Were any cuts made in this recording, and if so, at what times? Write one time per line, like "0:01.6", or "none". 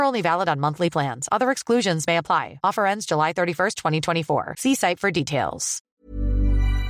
0:05.9